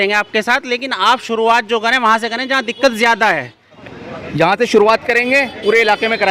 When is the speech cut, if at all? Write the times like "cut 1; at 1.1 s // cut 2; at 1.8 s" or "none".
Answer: cut 1; at 3.7 s